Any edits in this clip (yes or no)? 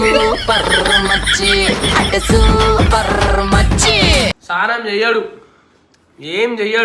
yes